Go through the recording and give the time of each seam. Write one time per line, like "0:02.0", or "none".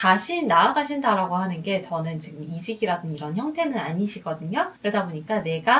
0:04.7